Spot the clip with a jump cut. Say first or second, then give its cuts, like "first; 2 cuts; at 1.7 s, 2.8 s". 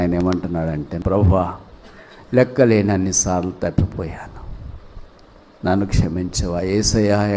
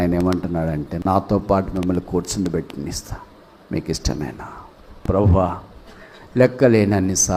first; 1 cut; at 0.9 s